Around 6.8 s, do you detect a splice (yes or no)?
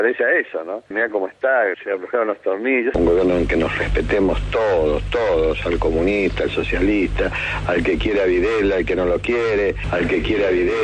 no